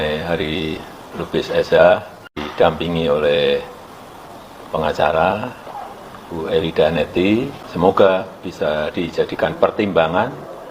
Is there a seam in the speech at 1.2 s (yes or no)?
no